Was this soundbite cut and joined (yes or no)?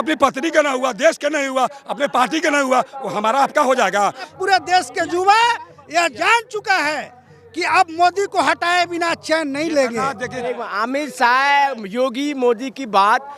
yes